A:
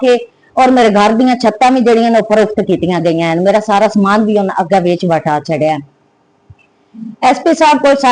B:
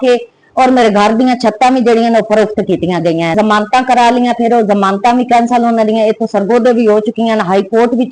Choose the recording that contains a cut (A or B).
B